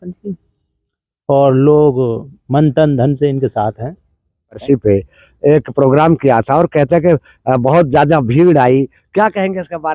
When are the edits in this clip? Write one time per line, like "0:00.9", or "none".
0:04.6